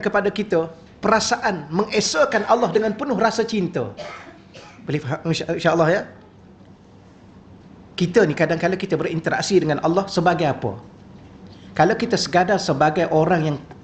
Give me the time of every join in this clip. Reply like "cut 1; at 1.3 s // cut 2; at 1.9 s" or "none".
none